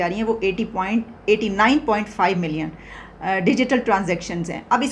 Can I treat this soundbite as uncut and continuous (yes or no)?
yes